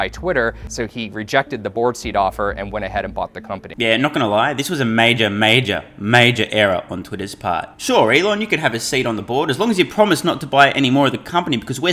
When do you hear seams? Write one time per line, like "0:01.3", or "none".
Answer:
none